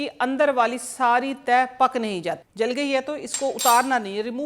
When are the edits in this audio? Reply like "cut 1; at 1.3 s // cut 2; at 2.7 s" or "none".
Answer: cut 1; at 2.4 s

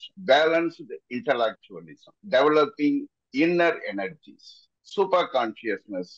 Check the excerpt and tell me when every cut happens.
none

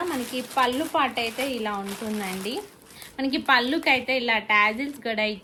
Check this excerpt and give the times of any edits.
none

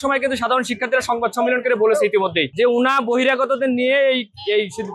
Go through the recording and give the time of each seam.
cut 1; at 2.4 s

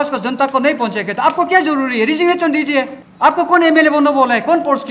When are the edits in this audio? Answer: cut 1; at 3.0 s

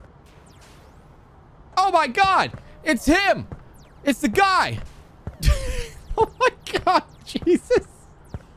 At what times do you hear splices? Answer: none

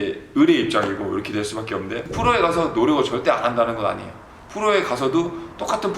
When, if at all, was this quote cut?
cut 1; at 2.1 s

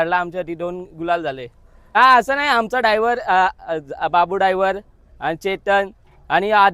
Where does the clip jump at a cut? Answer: cut 1; at 2.0 s

